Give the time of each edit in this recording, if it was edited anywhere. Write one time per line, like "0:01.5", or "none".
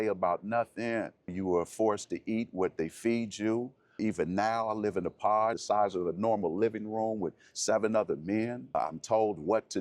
0:01.3
0:04.0
0:05.6
0:08.7